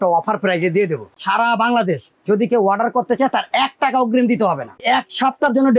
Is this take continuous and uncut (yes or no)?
no